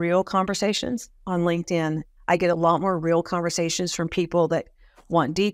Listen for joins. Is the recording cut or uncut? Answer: cut